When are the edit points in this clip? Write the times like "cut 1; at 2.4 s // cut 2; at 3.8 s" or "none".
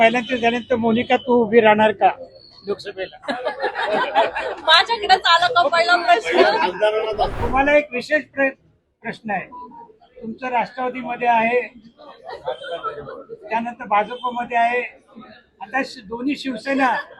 cut 1; at 7.3 s